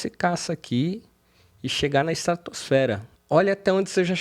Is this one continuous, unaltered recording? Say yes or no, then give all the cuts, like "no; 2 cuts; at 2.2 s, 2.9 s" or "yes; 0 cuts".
no; 1 cut; at 3.1 s